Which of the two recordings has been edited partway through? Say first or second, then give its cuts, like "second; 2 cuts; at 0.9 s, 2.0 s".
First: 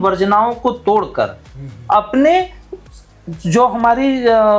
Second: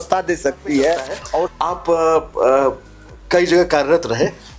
second; 1 cut; at 1.5 s